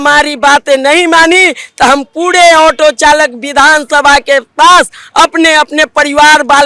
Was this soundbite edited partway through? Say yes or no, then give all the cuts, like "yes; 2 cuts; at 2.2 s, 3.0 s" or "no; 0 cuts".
no; 0 cuts